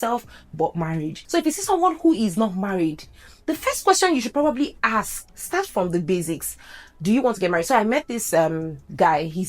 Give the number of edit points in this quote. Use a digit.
2